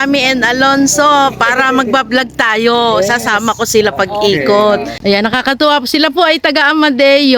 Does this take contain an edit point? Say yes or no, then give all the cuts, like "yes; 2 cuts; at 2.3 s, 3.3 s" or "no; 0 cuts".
yes; 1 cut; at 4.9 s